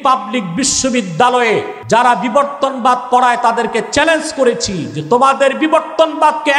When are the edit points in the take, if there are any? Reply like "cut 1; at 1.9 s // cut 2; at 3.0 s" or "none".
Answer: cut 1; at 1.7 s